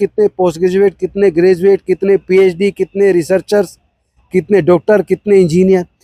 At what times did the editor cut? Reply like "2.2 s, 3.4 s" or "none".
none